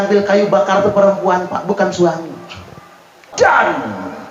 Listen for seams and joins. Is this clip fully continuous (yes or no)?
no